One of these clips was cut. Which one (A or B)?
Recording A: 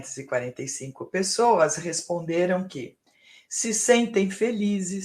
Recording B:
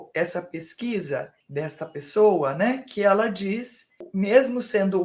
B